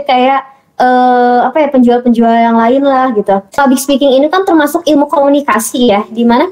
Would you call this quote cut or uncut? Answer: cut